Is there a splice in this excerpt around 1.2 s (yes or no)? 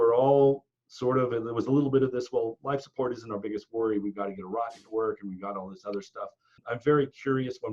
no